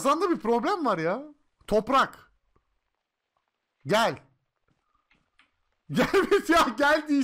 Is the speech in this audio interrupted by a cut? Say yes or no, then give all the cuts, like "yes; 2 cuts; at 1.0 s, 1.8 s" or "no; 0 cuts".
no; 0 cuts